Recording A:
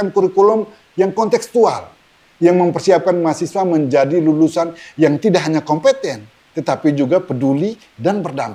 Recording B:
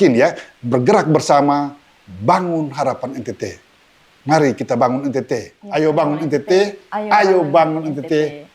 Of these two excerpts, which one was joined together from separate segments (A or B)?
B